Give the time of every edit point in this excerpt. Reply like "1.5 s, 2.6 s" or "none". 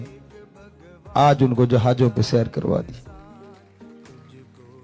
3.0 s